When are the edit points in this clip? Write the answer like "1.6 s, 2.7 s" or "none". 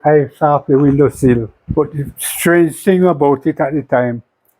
1.6 s